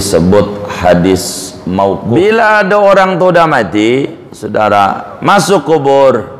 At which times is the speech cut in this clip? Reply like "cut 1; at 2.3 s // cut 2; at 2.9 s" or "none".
cut 1; at 2.0 s